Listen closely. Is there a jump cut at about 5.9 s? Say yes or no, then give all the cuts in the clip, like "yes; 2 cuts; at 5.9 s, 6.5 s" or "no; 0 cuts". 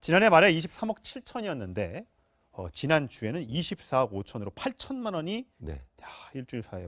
no; 0 cuts